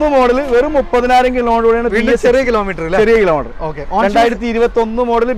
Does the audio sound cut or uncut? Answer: uncut